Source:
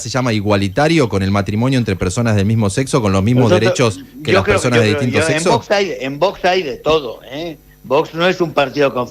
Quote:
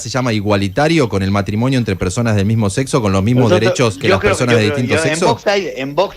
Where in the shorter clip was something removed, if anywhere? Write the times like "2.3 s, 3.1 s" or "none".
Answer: 4.0 s